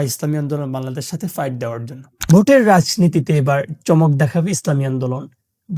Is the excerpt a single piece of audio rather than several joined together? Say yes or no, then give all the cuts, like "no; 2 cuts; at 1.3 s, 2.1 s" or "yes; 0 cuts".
no; 1 cut; at 2.1 s